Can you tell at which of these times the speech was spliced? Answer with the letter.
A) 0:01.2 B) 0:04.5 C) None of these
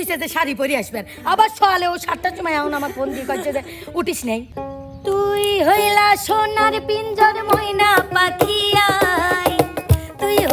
B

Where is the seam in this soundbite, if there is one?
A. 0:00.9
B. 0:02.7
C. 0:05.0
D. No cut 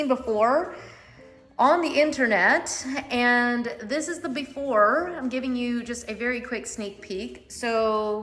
D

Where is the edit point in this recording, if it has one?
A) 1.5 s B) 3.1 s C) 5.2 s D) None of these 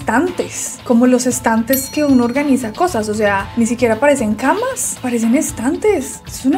D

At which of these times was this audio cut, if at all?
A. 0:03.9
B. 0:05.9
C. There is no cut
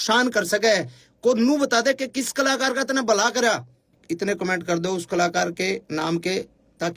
A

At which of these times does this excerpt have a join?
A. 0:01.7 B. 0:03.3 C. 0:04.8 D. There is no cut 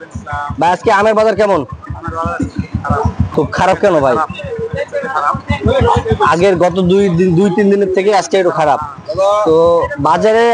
B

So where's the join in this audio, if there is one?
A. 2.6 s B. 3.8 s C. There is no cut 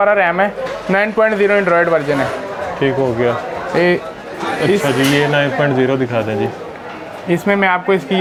C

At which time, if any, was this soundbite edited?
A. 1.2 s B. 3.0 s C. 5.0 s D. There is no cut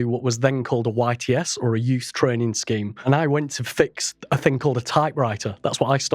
B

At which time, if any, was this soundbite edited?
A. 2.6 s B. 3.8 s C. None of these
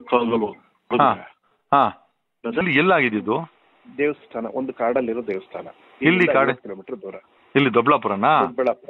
A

